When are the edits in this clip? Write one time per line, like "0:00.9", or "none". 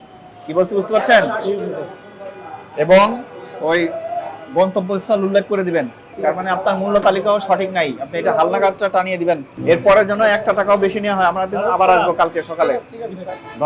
0:06.0
0:09.5